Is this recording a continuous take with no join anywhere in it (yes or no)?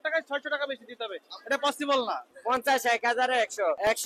no